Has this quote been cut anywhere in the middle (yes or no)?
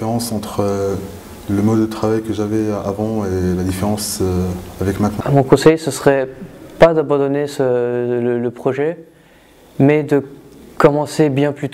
yes